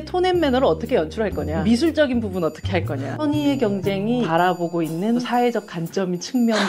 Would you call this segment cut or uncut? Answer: cut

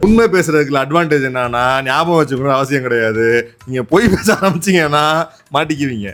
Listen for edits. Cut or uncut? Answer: uncut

